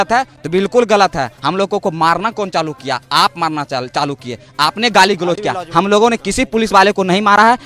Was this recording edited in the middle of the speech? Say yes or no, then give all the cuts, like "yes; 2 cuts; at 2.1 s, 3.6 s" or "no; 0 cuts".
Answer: no; 0 cuts